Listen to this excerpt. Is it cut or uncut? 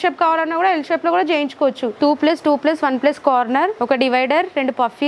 cut